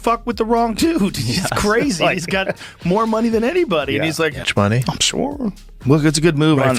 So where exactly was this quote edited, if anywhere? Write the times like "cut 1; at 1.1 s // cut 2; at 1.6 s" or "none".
cut 1; at 4.4 s